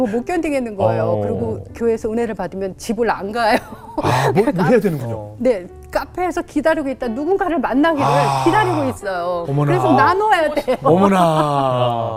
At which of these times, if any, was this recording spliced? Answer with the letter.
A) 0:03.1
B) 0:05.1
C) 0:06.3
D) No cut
D